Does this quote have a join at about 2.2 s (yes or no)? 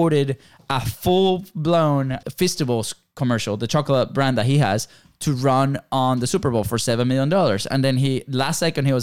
yes